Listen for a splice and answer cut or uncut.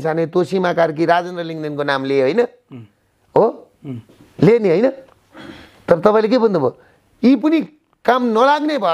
uncut